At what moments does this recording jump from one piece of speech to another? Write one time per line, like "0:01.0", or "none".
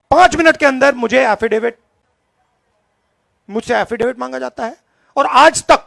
none